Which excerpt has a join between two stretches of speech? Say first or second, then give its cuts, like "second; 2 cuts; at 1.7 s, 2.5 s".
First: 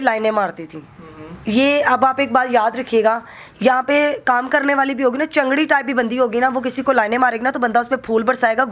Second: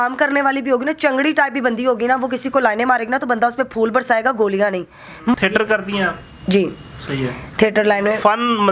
second; 1 cut; at 5.3 s